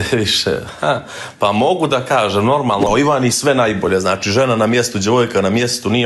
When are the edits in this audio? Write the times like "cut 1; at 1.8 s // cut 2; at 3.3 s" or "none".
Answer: cut 1; at 2.9 s